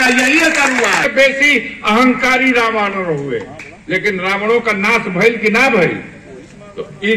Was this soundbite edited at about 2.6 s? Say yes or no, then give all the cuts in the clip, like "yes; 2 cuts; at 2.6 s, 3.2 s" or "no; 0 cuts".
no; 1 cut; at 1.0 s